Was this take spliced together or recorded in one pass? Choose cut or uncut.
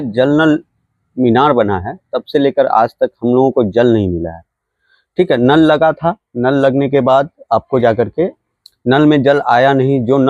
uncut